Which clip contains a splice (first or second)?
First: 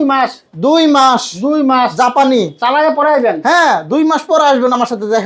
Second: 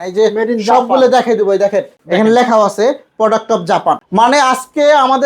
second